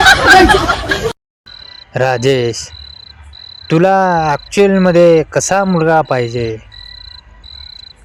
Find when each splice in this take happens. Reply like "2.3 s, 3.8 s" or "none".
none

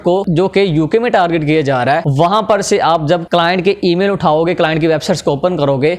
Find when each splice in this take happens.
2.1 s, 3.2 s

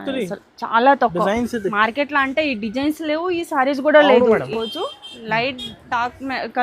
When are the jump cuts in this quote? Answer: 4.5 s

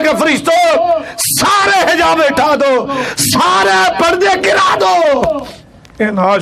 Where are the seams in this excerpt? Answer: none

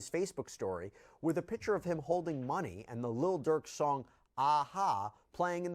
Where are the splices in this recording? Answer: none

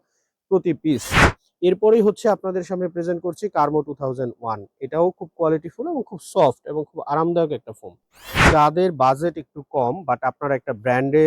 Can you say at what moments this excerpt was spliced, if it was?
8.5 s

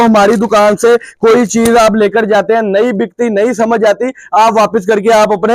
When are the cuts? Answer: none

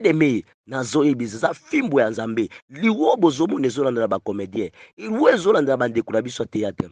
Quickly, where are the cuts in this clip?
none

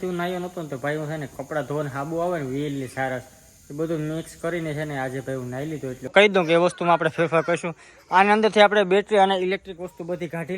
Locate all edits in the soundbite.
6.1 s

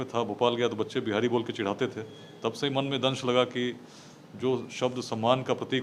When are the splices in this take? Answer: none

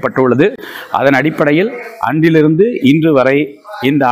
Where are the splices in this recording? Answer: none

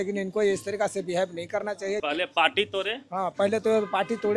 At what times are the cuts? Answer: 2.0 s

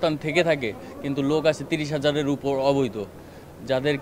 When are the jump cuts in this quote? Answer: none

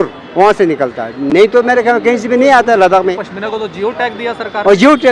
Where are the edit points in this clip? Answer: none

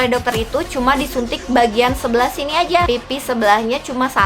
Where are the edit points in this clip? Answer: 2.9 s

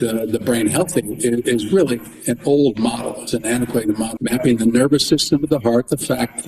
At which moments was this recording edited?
4.1 s

